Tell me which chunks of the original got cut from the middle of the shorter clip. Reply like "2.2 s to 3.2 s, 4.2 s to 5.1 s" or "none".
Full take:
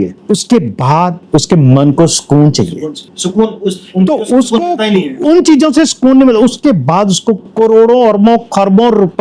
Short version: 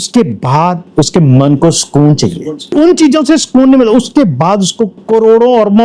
3.0 s to 5.1 s